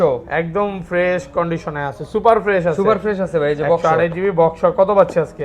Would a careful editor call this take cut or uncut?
uncut